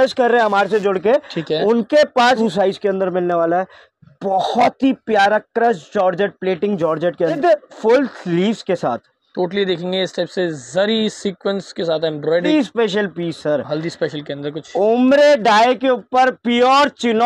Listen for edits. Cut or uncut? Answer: cut